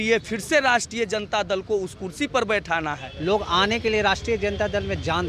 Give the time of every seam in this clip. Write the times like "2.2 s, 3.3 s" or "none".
3.1 s

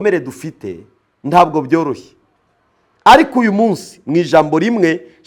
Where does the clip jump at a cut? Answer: none

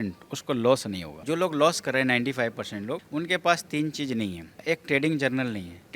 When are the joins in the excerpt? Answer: 1.1 s

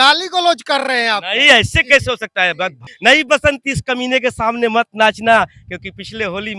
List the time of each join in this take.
2.8 s

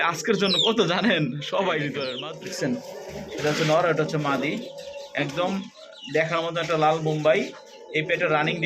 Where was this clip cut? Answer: 2.2 s

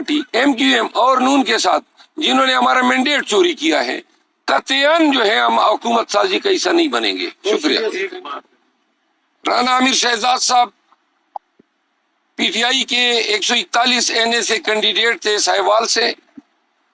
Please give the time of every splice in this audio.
8.3 s

